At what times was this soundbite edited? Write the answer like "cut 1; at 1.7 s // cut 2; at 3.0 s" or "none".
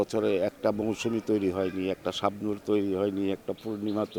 none